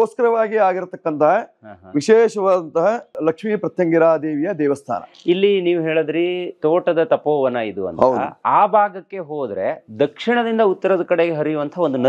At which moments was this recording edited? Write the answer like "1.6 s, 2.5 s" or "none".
none